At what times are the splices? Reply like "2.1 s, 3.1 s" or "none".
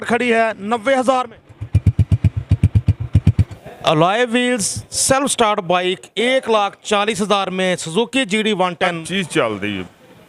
3.6 s, 9.0 s